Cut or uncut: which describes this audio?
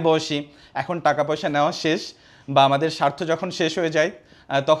uncut